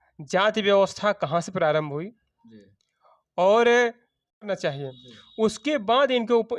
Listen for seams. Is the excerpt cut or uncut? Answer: cut